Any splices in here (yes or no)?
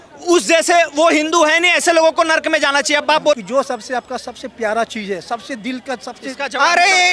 yes